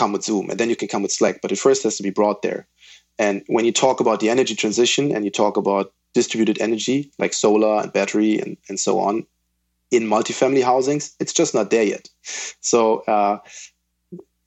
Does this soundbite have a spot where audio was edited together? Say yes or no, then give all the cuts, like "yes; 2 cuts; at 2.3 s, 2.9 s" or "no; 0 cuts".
no; 0 cuts